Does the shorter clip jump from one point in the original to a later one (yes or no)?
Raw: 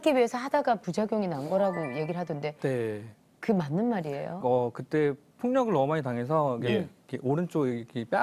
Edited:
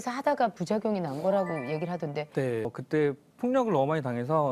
yes